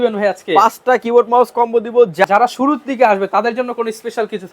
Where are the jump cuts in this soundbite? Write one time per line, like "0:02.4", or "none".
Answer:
0:02.2